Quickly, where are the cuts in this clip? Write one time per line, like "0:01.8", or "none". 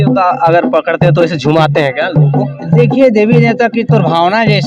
none